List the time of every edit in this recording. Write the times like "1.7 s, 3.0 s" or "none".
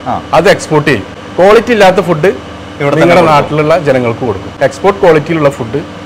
1.2 s, 4.5 s